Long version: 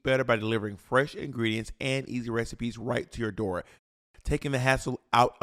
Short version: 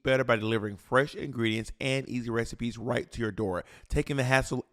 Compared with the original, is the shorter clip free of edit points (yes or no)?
no